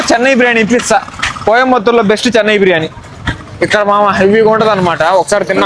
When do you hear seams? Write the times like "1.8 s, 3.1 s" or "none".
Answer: none